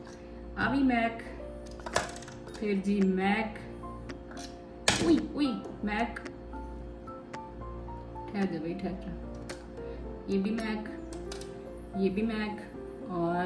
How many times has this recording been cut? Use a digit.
0